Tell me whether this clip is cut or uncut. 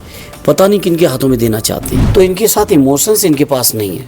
cut